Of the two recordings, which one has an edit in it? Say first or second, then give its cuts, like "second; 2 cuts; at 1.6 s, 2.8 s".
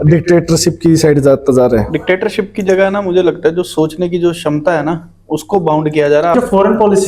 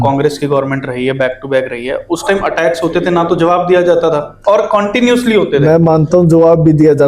first; 2 cuts; at 1.9 s, 6.3 s